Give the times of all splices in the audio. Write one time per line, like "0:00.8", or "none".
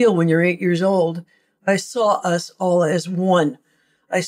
0:01.7